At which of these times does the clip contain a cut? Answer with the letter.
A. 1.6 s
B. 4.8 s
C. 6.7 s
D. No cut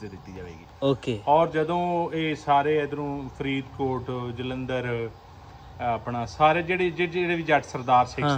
D